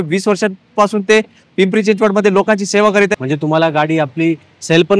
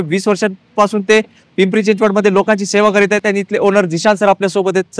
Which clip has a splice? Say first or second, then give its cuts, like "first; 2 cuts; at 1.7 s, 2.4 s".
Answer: first; 1 cut; at 3.2 s